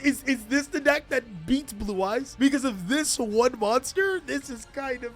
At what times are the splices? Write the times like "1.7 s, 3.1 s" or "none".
2.3 s